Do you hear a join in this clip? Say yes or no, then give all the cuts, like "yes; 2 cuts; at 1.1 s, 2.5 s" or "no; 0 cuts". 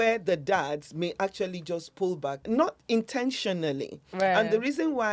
yes; 1 cut; at 2.4 s